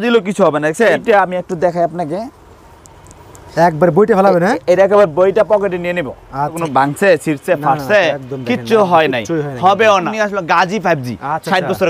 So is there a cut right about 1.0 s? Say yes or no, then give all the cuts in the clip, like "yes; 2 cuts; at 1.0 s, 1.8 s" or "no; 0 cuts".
yes; 3 cuts; at 1.0 s, 6.6 s, 10.1 s